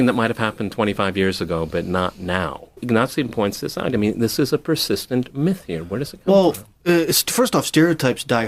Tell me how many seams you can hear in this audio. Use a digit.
1